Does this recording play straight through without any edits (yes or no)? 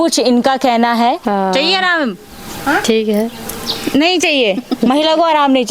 no